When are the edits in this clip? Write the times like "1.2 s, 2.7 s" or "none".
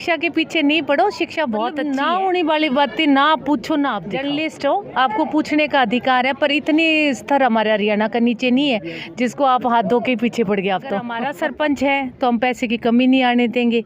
1.8 s, 4.2 s, 11.2 s